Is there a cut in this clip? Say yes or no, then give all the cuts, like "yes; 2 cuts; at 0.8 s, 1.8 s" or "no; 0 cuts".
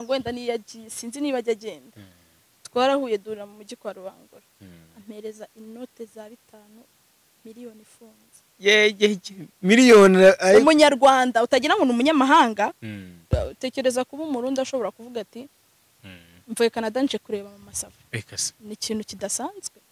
yes; 1 cut; at 13.2 s